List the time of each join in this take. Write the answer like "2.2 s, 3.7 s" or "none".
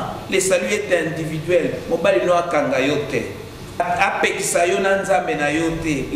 3.8 s